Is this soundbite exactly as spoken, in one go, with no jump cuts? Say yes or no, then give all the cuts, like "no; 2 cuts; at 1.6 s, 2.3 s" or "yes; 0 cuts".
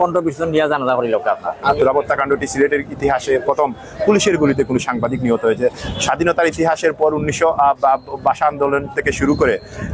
no; 1 cut; at 1.7 s